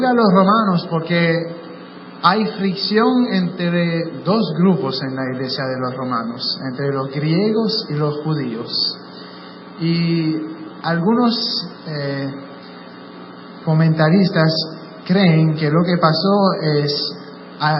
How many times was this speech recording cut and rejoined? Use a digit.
1